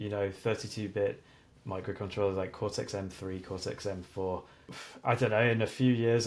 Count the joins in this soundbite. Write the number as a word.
one